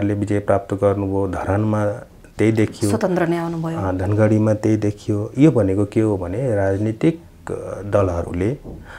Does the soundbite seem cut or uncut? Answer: uncut